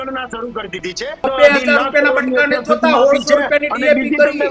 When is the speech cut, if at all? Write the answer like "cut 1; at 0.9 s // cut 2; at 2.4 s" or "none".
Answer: cut 1; at 1.2 s

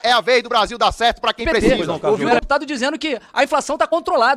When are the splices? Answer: cut 1; at 1.5 s

